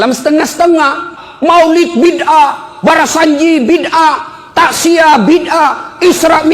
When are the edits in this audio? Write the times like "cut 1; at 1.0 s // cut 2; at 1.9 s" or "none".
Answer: cut 1; at 1.2 s